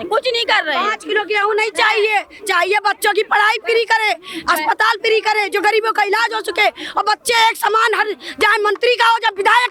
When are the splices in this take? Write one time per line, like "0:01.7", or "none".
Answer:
none

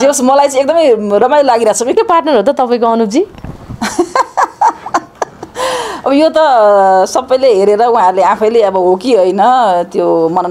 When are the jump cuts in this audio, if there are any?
0:01.9

